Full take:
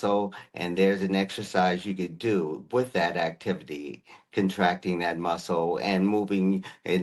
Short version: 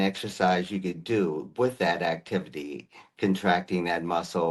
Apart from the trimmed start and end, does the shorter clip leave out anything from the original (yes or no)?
no